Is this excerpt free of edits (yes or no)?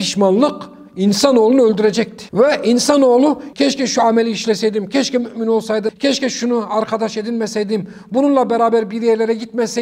no